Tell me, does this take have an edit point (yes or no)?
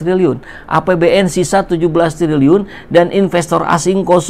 no